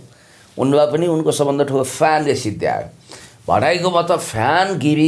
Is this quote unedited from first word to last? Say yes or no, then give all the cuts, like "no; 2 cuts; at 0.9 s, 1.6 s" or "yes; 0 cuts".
yes; 0 cuts